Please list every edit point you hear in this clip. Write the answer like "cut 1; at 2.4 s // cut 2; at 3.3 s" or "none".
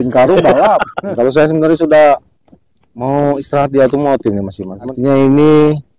cut 1; at 1.0 s // cut 2; at 4.8 s